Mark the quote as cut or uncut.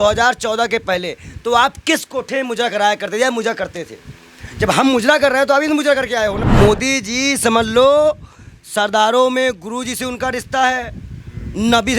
cut